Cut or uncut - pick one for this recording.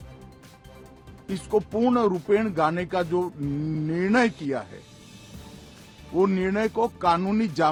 uncut